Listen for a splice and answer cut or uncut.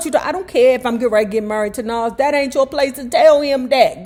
uncut